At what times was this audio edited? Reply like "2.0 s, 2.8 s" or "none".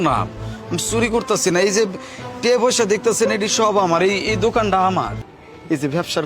5.2 s